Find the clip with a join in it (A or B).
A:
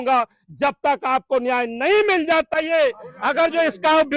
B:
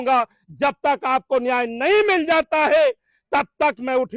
A